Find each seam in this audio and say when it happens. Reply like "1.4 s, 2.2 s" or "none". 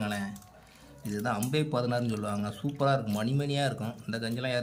none